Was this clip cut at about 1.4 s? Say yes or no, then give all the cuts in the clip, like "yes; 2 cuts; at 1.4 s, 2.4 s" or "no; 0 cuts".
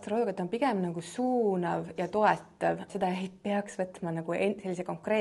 no; 1 cut; at 2.9 s